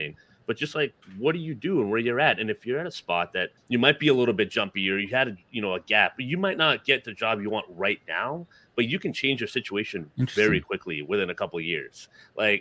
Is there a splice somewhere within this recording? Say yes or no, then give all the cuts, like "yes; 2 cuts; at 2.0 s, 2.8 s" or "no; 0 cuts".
yes; 1 cut; at 3.6 s